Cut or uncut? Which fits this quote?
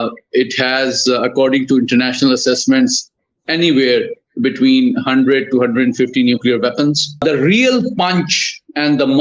cut